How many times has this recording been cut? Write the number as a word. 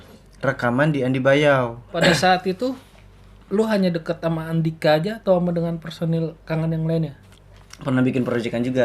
two